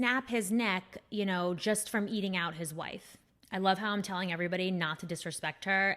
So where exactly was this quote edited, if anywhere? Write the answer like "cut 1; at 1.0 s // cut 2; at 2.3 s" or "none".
cut 1; at 3.3 s